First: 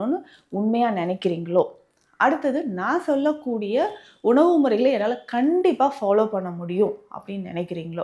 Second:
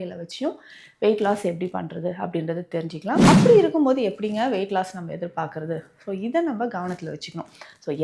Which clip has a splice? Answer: second; 1 cut; at 3.2 s

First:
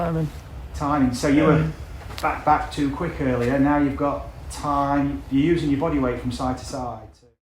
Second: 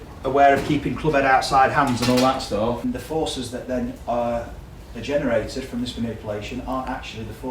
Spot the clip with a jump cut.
second; 1 cut; at 2.8 s

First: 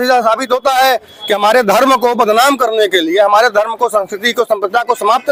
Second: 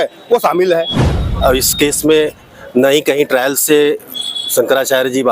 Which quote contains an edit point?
second; 1 cut; at 1.3 s

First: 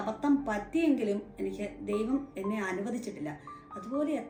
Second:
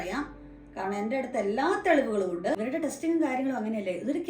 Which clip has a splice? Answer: second; 1 cut; at 2.6 s

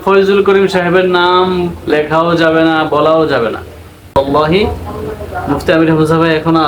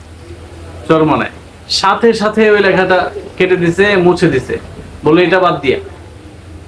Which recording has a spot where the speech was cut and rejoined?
first; 1 cut; at 4.1 s

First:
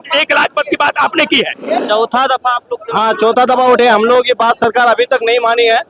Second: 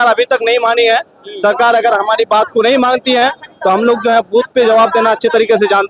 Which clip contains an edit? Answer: first; 1 cut; at 1.8 s

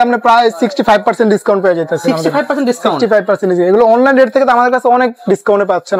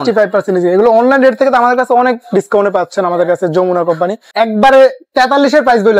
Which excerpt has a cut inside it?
second; 1 cut; at 4.2 s

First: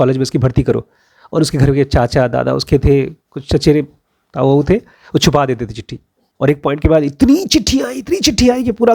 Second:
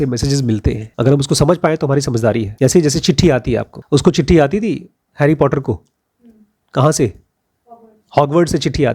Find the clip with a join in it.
second; 3 cuts; at 0.9 s, 2.5 s, 3.7 s

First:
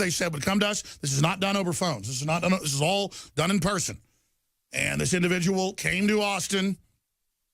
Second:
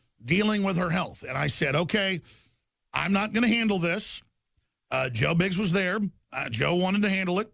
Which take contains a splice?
second; 1 cut; at 1.7 s

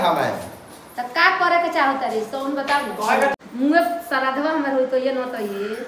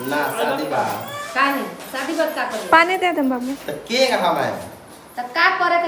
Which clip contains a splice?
first; 1 cut; at 3.3 s

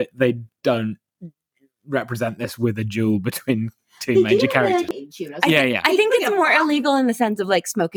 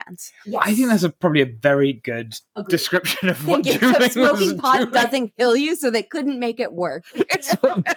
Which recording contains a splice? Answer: first; 1 cut; at 4.9 s

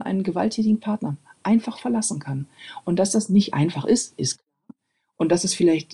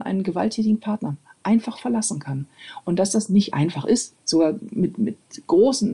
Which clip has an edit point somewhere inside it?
second; 1 cut; at 4.1 s

